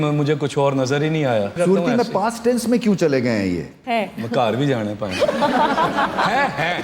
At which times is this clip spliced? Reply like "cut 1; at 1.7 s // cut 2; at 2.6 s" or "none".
cut 1; at 1.5 s // cut 2; at 3.7 s